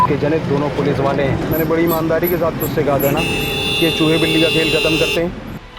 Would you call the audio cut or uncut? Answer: cut